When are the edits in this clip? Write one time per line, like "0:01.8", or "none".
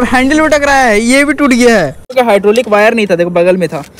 0:02.0

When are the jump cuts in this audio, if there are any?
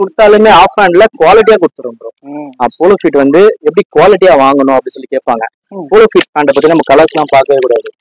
0:02.6

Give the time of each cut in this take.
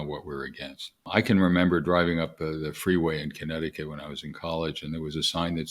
0:01.0

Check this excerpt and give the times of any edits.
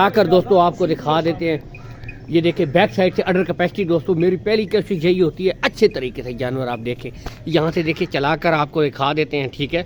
none

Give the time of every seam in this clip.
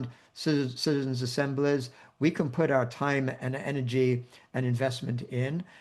none

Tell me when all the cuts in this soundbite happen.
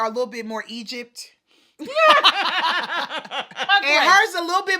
0:03.6

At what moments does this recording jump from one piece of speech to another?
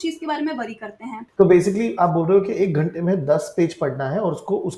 0:01.1

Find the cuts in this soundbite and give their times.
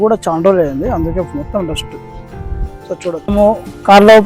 0:03.3

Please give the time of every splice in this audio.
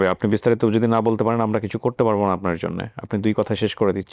none

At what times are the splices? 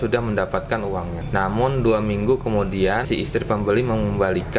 0:01.2
0:03.0

